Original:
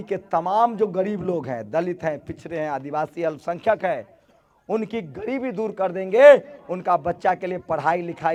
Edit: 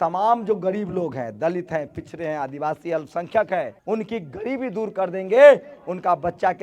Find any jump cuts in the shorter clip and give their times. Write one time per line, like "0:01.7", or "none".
0:03.8